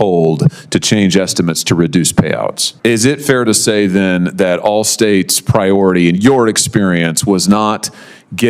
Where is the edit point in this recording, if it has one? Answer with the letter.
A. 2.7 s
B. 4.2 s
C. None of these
A